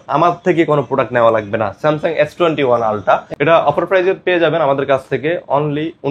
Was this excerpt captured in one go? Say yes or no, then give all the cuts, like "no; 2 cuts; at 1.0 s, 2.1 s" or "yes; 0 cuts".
no; 1 cut; at 3.3 s